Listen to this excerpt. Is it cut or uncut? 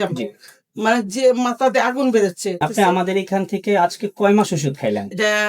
cut